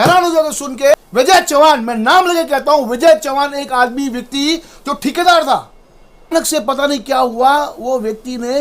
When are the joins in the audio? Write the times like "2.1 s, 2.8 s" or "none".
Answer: 0.9 s, 6.3 s